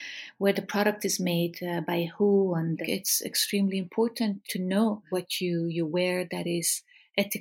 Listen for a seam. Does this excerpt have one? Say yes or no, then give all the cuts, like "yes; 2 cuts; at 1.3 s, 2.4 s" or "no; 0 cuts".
yes; 2 cuts; at 2.8 s, 5.0 s